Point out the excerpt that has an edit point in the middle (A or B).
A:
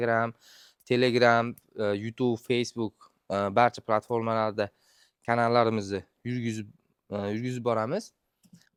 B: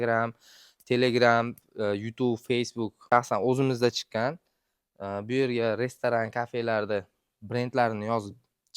B